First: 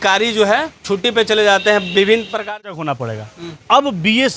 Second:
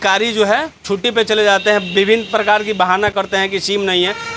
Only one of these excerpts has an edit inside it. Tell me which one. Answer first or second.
first